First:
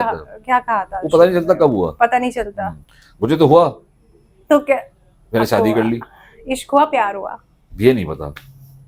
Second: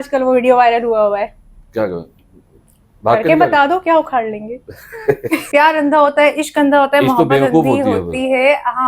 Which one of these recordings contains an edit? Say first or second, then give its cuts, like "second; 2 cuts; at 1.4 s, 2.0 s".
second; 1 cut; at 5.4 s